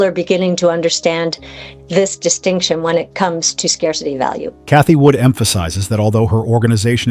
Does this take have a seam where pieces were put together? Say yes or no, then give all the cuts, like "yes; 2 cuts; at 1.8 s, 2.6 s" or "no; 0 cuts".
no; 0 cuts